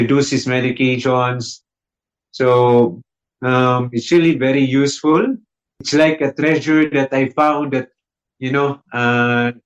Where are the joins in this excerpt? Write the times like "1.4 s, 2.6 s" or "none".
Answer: 5.9 s